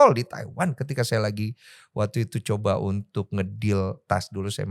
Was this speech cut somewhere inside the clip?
no; 0 cuts

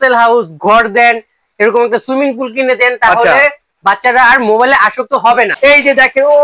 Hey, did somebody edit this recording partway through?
yes; 1 cut; at 5.5 s

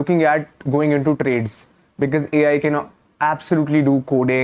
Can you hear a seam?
no; 0 cuts

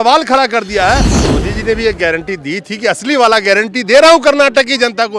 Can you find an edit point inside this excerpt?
yes; 1 cut; at 1.1 s

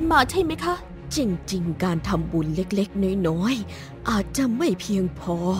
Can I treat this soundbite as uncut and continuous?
no; 1 cut; at 1.0 s

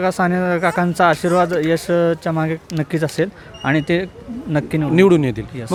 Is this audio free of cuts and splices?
yes; 0 cuts

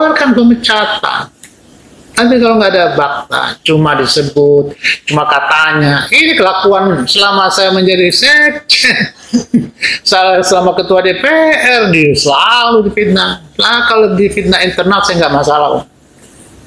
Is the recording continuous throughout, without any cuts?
yes; 0 cuts

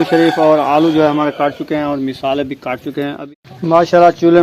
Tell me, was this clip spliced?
yes; 1 cut; at 3.2 s

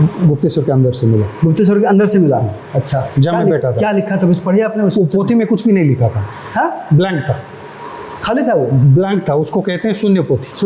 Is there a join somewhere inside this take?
no; 0 cuts

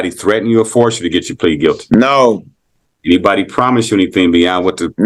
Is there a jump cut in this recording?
no; 0 cuts

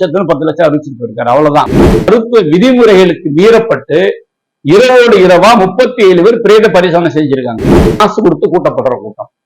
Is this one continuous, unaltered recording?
no; 2 cuts; at 1.9 s, 7.9 s

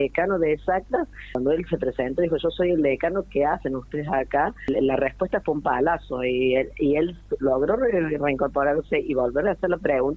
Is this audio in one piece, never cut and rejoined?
no; 2 cuts; at 1.3 s, 4.7 s

